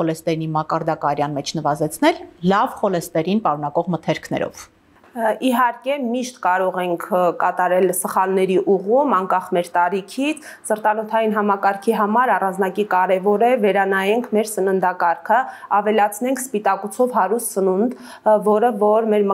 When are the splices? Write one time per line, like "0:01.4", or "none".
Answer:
none